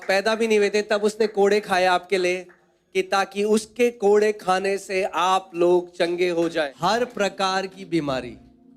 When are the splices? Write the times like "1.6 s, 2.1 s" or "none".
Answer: 6.7 s